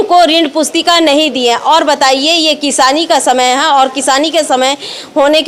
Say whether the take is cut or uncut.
uncut